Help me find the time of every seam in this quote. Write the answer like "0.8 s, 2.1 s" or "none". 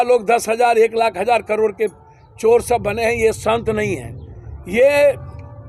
none

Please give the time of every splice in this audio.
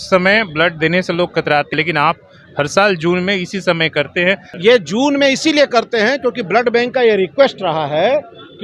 1.7 s, 4.5 s

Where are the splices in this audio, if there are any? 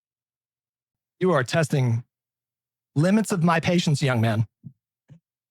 1.0 s

